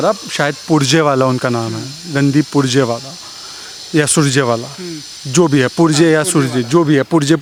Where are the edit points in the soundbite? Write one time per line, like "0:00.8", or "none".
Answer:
none